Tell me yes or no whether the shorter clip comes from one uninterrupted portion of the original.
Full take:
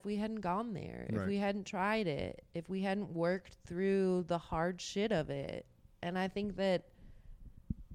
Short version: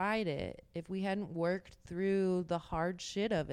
yes